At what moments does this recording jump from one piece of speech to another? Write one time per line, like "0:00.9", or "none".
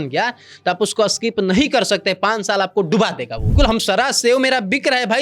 0:03.5